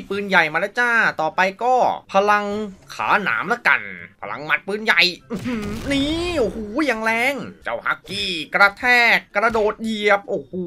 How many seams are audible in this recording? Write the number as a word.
two